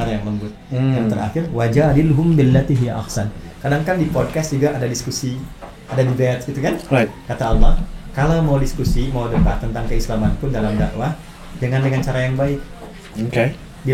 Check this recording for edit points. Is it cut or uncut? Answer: uncut